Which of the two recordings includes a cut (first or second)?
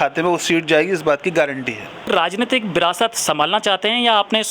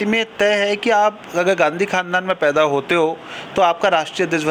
first